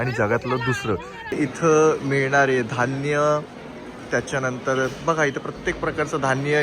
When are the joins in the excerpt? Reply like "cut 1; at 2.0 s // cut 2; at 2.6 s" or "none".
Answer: cut 1; at 1.4 s